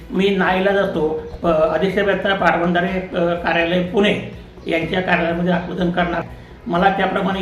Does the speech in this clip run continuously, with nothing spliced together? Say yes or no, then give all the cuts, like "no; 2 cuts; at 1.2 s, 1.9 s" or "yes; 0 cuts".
no; 1 cut; at 6.3 s